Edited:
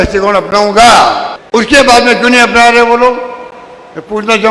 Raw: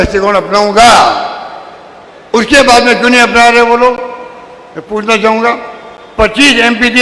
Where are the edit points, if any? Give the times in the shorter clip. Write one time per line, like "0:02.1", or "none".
0:01.3